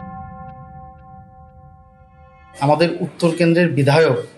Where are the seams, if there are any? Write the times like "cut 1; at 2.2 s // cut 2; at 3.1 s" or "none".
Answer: cut 1; at 2.4 s